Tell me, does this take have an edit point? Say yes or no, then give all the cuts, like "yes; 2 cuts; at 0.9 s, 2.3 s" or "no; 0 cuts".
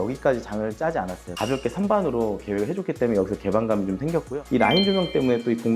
yes; 2 cuts; at 1.4 s, 4.4 s